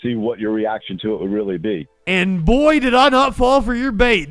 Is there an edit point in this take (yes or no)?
no